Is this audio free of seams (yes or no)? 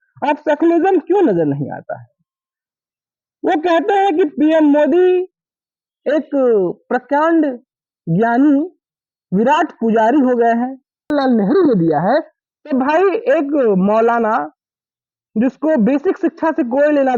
no